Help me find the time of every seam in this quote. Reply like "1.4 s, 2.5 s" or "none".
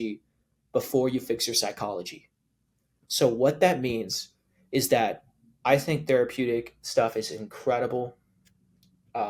none